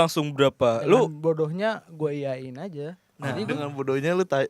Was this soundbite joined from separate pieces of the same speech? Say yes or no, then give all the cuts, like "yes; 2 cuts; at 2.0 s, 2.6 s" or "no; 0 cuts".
no; 0 cuts